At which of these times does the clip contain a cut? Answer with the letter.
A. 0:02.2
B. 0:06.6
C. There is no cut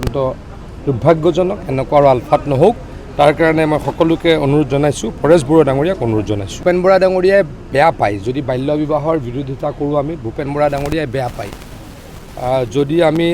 B